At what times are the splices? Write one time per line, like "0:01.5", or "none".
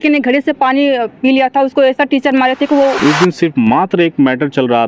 0:03.0